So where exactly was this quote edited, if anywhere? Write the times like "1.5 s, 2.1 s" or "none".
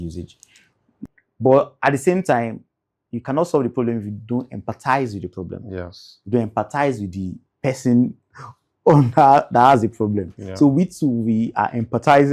1.0 s